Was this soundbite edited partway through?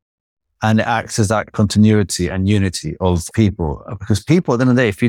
yes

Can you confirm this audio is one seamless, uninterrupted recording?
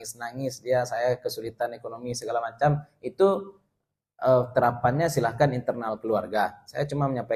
yes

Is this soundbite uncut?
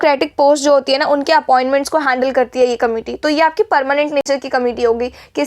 yes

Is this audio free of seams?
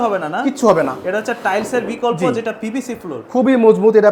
yes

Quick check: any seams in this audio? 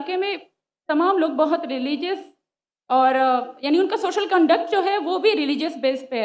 no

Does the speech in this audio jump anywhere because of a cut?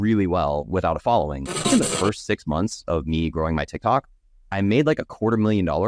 yes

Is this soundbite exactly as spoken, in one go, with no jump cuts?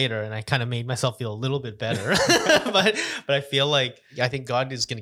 no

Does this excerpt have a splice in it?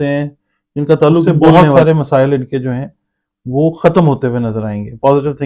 yes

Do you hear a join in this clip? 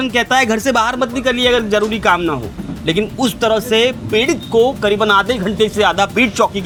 no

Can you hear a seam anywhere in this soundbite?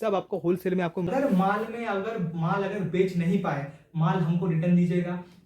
yes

